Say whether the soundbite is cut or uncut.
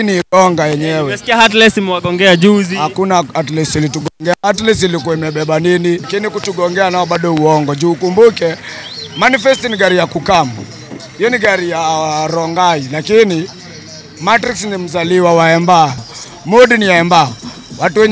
cut